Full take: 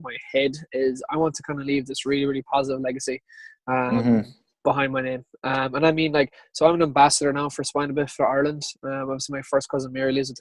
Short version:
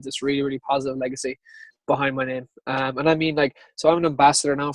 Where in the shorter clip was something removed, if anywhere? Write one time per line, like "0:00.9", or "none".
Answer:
0:01.6

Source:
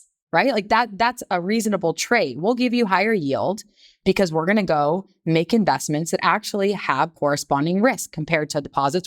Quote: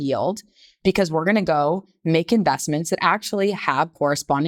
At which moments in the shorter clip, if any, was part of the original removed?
none

